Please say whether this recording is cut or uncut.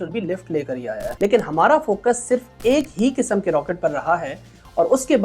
cut